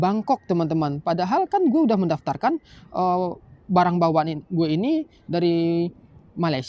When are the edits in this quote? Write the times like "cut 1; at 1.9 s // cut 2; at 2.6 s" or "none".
none